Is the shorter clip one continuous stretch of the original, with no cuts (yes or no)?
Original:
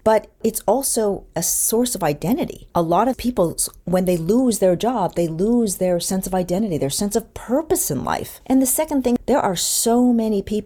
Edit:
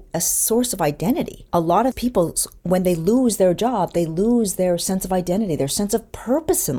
yes